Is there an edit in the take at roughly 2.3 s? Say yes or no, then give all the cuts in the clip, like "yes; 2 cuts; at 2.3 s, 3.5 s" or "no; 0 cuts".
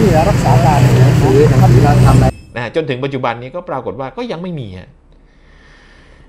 yes; 1 cut; at 2.3 s